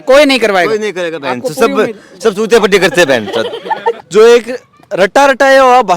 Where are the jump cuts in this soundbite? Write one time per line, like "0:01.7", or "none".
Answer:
0:04.0

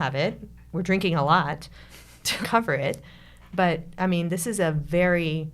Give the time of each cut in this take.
0:02.4

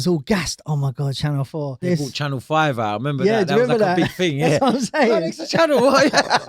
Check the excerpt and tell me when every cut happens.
0:01.8

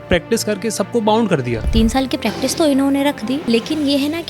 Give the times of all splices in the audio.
0:01.7
0:03.4

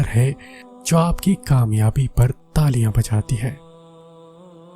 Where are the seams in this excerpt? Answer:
0:03.6

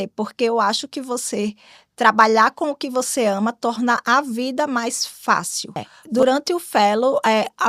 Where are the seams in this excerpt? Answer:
0:05.9

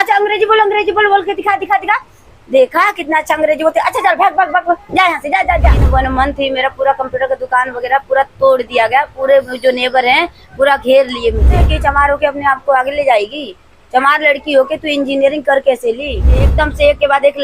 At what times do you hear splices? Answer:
0:05.8
0:11.6
0:16.5

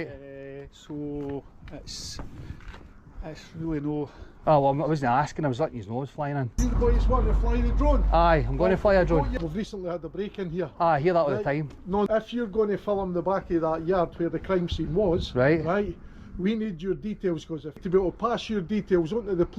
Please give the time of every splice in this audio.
0:06.5
0:09.3
0:12.1
0:17.8

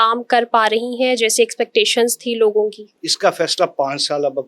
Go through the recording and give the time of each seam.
0:03.0

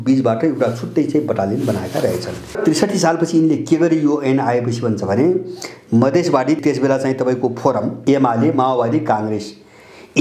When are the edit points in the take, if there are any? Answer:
0:02.6
0:06.6
0:08.0

